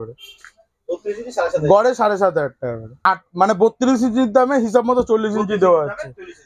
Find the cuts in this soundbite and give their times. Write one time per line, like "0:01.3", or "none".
0:02.9